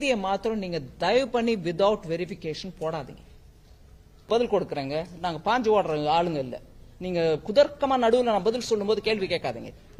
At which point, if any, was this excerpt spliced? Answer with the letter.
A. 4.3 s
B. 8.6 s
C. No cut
A